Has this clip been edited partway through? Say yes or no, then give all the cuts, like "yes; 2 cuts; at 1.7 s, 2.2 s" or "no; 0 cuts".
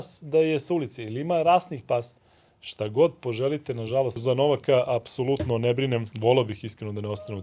yes; 2 cuts; at 4.2 s, 6.1 s